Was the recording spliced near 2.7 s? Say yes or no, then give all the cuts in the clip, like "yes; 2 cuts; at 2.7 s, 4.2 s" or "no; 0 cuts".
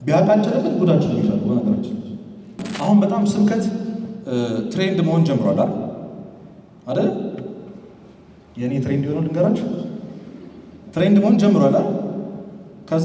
yes; 1 cut; at 2.7 s